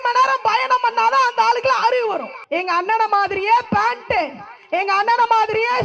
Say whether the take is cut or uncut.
cut